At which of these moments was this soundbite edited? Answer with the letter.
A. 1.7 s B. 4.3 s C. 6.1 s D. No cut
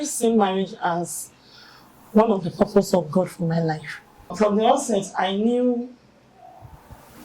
B